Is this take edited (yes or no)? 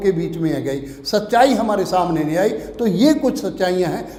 no